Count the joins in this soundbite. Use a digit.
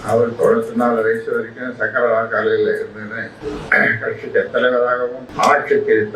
2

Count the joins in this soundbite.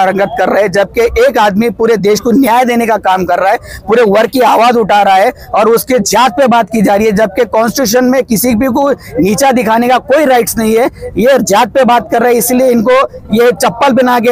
0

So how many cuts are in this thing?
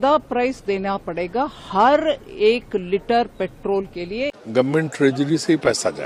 1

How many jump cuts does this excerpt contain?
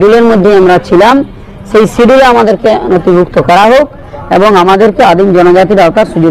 0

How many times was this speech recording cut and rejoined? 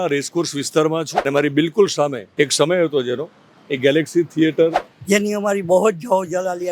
3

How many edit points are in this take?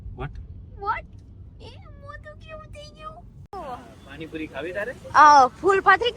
1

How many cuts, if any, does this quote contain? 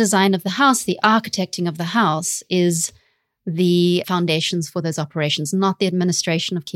0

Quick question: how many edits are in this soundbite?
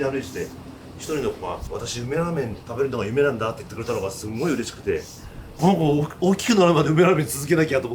2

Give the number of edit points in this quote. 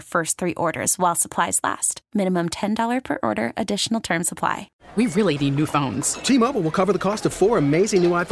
1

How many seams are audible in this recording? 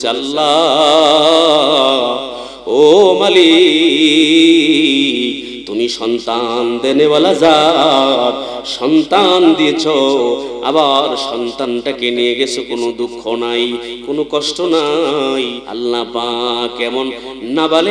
1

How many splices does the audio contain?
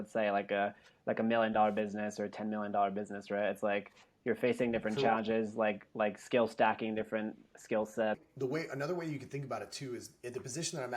1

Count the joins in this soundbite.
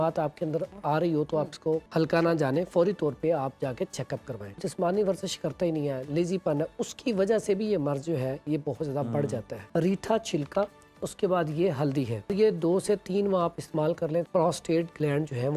5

